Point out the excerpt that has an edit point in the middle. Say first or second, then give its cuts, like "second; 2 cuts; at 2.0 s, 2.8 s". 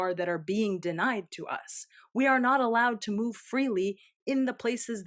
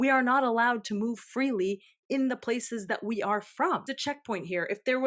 second; 1 cut; at 3.9 s